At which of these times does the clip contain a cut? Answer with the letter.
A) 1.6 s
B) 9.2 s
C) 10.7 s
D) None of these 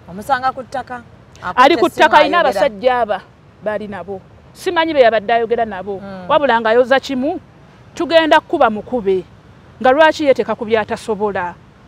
D